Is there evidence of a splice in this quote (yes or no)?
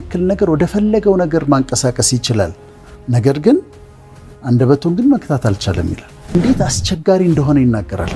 yes